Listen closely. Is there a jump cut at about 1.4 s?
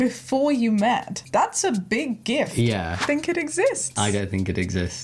no; 1 cut; at 3.0 s

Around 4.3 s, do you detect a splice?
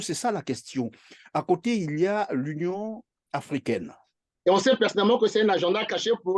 yes; 1 cut; at 4.3 s

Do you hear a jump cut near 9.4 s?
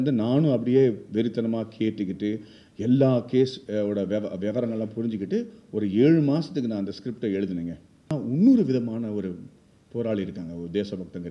no; 1 cut; at 8.1 s

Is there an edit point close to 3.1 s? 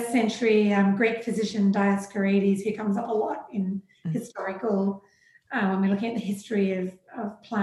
no; 0 cuts

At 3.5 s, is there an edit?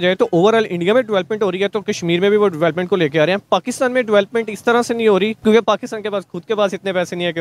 no; 1 cut; at 5.4 s

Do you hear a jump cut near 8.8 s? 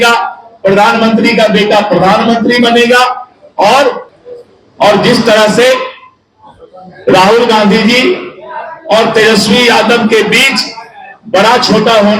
no; 1 cut; at 4.1 s

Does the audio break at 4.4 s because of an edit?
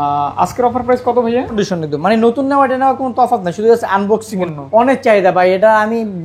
yes; 2 cuts; at 1.6 s, 4.4 s

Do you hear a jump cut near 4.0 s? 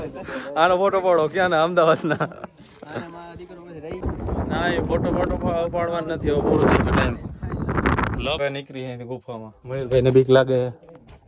yes; 2 cuts; at 4.0 s, 8.4 s

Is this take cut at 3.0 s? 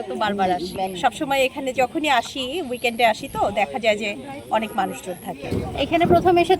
no; 2 cuts; at 0.9 s, 5.5 s

